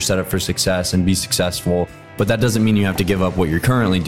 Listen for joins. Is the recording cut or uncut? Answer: uncut